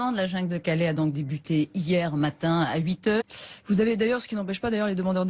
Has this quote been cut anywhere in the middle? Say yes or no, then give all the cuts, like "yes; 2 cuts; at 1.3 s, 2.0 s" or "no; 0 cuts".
no; 0 cuts